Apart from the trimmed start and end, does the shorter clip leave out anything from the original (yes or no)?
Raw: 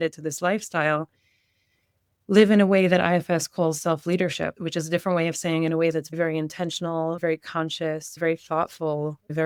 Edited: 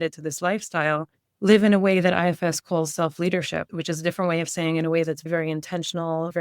yes